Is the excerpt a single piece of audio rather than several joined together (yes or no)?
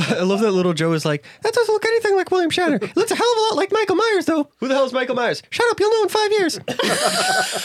yes